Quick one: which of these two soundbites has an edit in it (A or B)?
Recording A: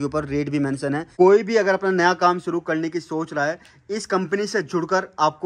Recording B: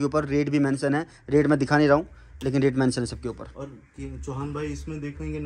A